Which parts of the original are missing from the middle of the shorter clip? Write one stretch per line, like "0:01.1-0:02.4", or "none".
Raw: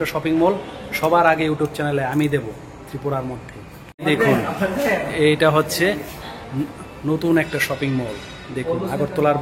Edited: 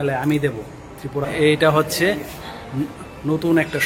0:03.2-0:05.1